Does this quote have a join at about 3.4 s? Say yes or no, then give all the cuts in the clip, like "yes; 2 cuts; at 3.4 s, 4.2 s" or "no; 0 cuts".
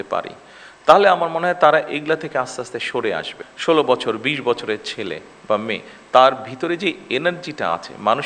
yes; 1 cut; at 3.4 s